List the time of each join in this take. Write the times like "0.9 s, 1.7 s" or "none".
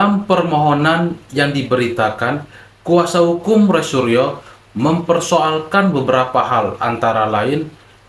none